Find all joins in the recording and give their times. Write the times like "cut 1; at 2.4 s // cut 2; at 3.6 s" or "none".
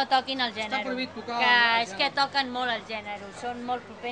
none